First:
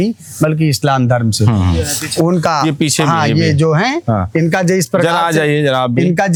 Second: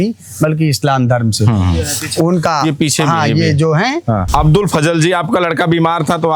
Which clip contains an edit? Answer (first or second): second